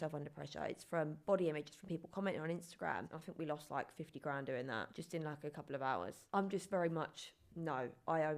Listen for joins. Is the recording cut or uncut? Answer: cut